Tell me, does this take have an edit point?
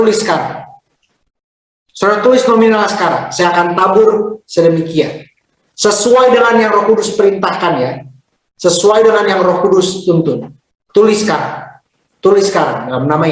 no; 0 cuts

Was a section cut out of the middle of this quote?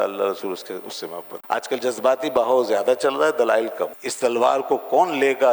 yes; 2 cuts; at 1.3 s, 4.0 s

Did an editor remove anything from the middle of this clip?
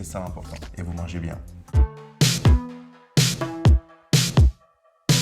yes; 1 cut; at 1.7 s

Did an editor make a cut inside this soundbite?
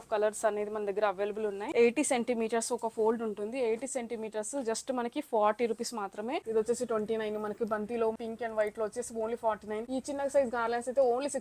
yes; 4 cuts; at 1.6 s, 6.5 s, 8.2 s, 9.9 s

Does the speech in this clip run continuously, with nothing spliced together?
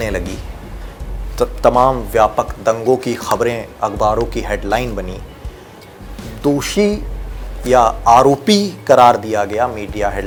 yes; 0 cuts

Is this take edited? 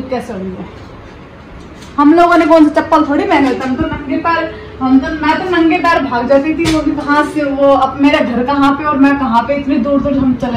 no; 0 cuts

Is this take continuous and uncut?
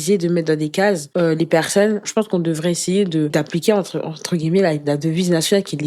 no; 3 cuts; at 1.1 s, 2.0 s, 3.3 s

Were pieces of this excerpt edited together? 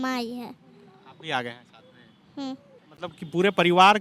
no; 0 cuts

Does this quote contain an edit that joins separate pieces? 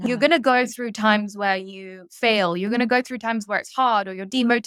no; 0 cuts

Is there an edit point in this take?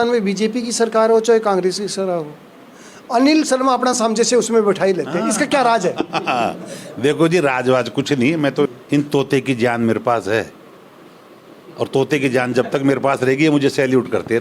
yes; 1 cut; at 8.7 s

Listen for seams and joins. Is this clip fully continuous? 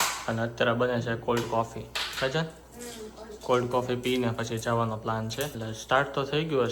no; 1 cut; at 5.6 s

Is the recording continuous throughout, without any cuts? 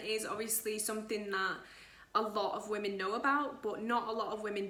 yes; 0 cuts

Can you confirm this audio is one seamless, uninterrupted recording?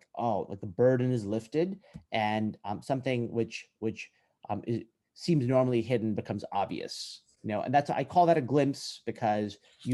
yes; 0 cuts

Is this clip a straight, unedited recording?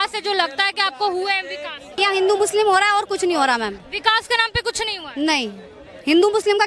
no; 2 cuts; at 2.0 s, 3.8 s

